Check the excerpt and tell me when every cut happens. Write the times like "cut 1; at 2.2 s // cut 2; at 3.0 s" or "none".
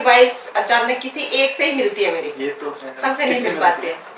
none